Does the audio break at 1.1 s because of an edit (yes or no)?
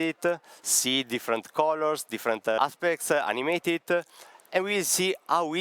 no